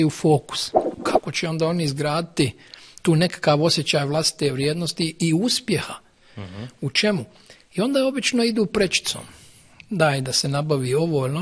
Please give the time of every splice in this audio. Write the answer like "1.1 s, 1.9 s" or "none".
1.0 s